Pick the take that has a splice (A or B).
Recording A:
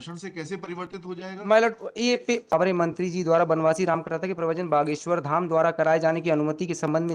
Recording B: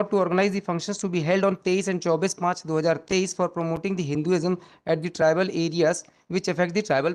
A